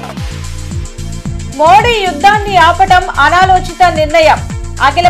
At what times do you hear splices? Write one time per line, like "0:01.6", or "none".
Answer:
none